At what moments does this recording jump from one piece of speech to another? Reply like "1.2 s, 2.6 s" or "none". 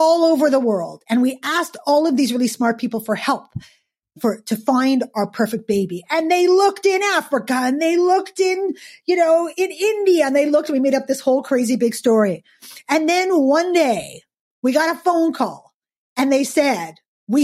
none